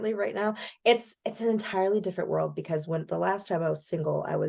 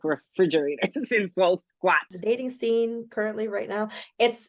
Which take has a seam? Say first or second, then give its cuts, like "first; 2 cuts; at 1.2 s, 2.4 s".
second; 1 cut; at 2.1 s